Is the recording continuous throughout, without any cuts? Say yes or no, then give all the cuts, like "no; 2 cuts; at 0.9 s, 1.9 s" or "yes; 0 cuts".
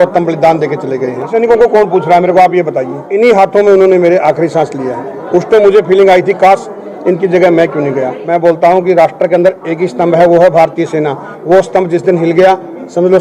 no; 3 cuts; at 1.3 s, 3.0 s, 8.1 s